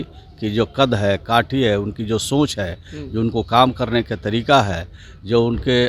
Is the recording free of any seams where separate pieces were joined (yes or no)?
yes